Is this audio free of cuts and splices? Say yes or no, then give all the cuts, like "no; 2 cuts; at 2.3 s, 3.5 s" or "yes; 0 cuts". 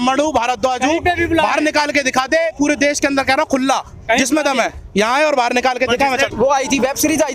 no; 1 cut; at 6.3 s